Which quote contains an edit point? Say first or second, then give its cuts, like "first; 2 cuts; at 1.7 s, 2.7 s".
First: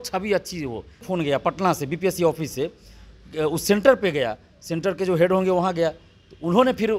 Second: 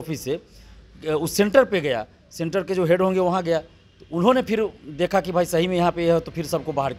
first; 1 cut; at 1.1 s